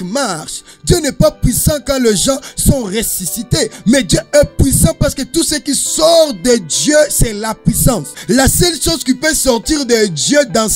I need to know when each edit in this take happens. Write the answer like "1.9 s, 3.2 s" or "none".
8.1 s